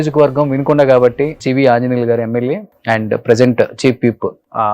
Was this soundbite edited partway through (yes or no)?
yes